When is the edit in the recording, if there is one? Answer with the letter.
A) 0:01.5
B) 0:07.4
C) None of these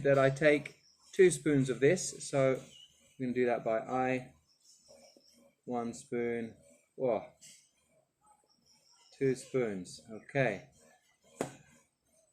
C